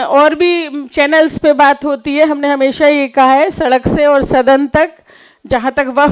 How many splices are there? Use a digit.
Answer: 0